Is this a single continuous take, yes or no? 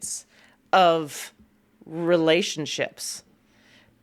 yes